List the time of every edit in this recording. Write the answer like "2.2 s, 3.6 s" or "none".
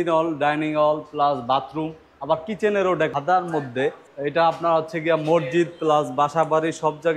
3.1 s, 4.1 s